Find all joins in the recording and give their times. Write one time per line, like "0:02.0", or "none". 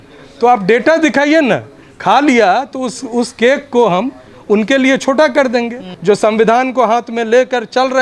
0:05.9